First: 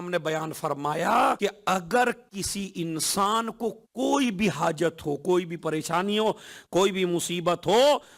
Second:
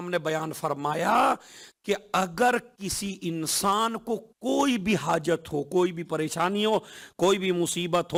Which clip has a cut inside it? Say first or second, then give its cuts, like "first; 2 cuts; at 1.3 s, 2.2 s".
first; 1 cut; at 1.4 s